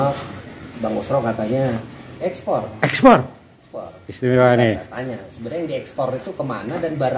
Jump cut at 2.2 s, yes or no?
yes